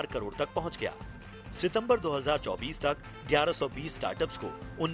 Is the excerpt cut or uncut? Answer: cut